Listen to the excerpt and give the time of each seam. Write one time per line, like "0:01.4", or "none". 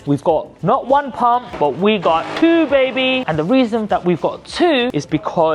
none